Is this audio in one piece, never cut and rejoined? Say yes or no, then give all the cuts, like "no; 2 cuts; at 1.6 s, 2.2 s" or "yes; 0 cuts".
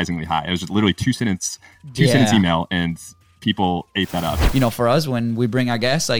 no; 1 cut; at 4.4 s